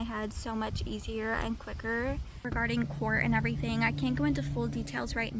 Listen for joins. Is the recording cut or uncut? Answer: cut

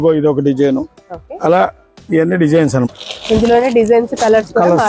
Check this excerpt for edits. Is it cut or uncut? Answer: cut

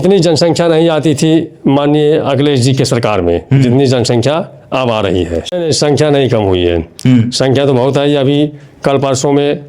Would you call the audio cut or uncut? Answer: cut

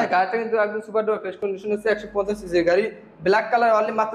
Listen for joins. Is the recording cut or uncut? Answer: uncut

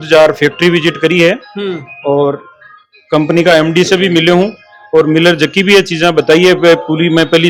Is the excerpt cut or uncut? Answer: uncut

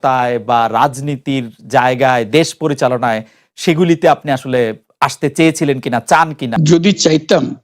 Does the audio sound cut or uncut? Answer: cut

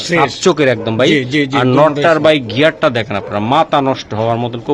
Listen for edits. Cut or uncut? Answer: uncut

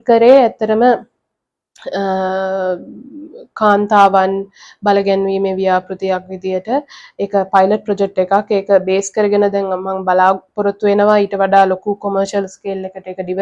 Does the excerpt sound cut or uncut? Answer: uncut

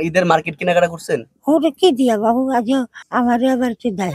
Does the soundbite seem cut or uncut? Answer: cut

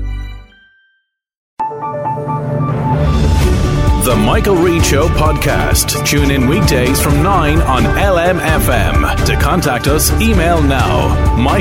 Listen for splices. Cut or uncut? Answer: cut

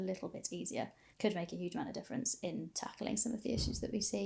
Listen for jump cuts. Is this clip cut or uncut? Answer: cut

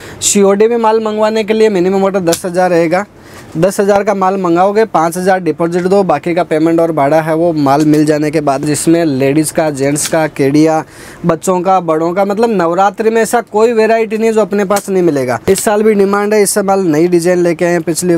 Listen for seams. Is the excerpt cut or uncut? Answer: cut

